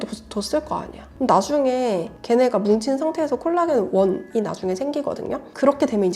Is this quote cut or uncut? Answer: uncut